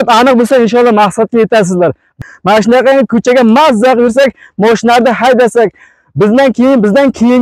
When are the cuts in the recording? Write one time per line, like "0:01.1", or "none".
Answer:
0:02.1